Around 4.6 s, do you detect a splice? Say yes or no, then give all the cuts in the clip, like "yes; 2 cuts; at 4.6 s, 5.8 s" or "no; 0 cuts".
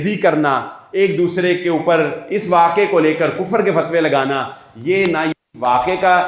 no; 0 cuts